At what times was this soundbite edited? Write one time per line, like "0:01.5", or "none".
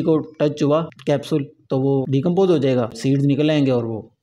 0:00.9
0:02.1
0:03.0

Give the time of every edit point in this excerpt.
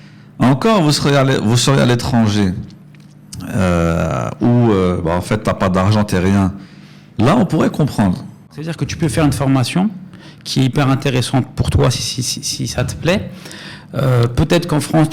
0:08.6

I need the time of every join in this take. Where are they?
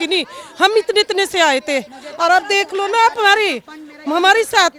none

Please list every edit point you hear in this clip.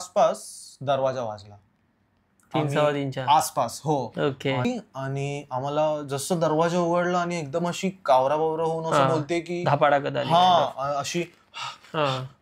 0:04.6

